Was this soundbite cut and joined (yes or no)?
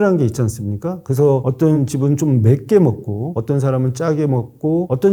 no